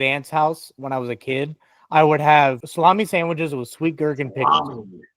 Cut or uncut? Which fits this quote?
cut